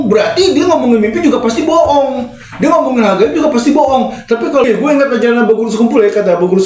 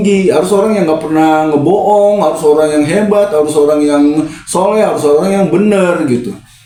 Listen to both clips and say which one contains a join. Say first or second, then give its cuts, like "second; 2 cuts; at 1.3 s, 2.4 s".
first; 1 cut; at 4.7 s